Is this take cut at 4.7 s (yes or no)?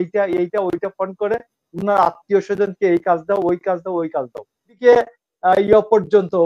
yes